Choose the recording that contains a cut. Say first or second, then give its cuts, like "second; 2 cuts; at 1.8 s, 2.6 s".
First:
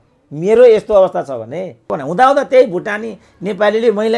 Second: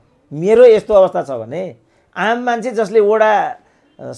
first; 1 cut; at 1.9 s